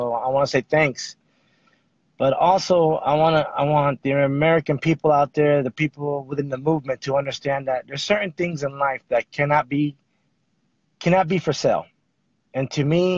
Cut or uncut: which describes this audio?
cut